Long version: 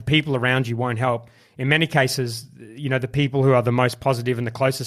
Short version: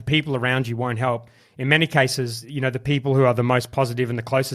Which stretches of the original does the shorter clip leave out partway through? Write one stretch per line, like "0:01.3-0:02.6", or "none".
0:02.4-0:02.7